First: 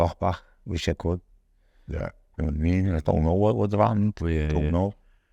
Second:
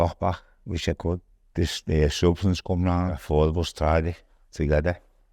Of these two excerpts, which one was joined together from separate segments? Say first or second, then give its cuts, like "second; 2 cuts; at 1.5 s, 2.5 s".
second; 2 cuts; at 1.4 s, 3.2 s